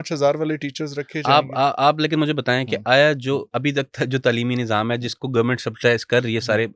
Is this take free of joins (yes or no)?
yes